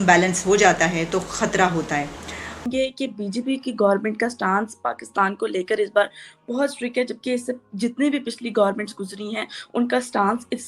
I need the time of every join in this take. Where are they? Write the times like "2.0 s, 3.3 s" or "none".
2.7 s